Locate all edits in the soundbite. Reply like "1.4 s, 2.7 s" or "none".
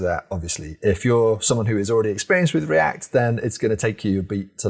none